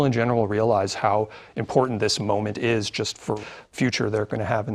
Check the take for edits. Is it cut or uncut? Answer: uncut